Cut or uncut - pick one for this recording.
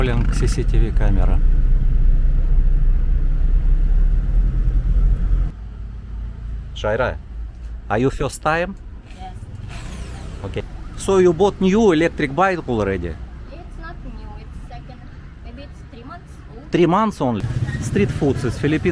cut